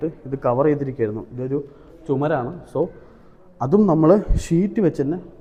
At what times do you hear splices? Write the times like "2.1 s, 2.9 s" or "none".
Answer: none